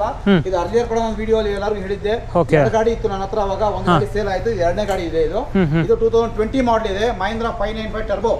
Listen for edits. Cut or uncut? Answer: uncut